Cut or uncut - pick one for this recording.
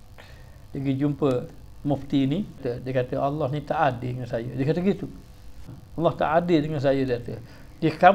cut